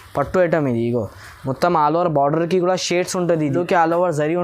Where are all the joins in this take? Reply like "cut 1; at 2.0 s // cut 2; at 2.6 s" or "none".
cut 1; at 3.4 s